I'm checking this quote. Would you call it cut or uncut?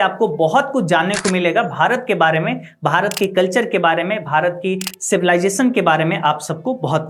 uncut